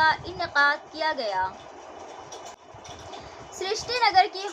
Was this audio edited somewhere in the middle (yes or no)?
yes